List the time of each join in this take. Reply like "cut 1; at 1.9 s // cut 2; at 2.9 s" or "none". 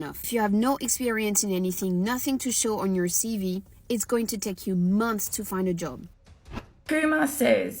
cut 1; at 6.3 s